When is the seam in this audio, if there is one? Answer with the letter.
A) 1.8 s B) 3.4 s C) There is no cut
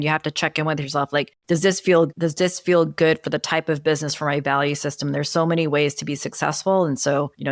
C